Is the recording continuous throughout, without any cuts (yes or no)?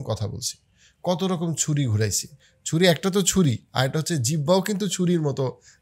yes